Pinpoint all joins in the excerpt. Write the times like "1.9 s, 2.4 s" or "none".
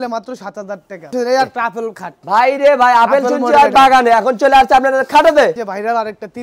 1.0 s, 5.5 s